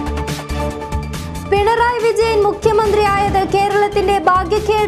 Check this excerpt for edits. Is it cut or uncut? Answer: cut